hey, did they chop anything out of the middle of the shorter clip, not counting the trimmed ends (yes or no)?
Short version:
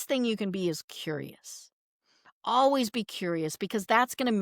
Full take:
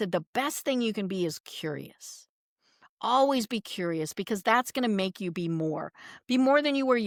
no